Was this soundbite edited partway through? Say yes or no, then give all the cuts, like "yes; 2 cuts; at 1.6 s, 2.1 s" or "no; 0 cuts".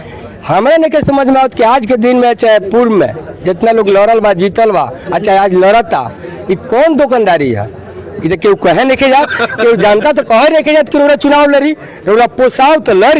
no; 0 cuts